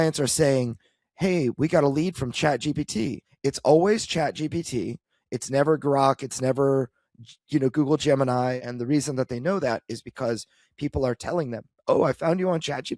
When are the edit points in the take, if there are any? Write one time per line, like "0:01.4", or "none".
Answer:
0:03.3
0:08.6